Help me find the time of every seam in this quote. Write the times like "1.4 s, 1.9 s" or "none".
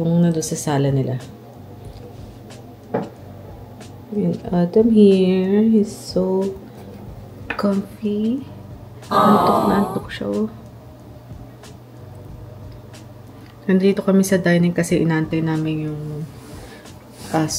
none